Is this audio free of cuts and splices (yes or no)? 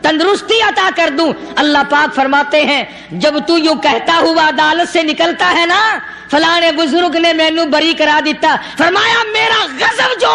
yes